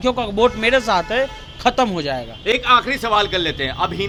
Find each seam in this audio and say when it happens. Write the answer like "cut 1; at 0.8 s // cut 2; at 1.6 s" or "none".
none